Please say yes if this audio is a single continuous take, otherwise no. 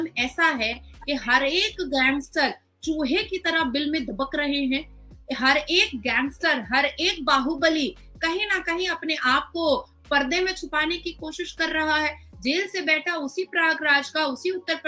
yes